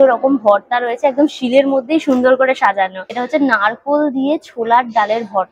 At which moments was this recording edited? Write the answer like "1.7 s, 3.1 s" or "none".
none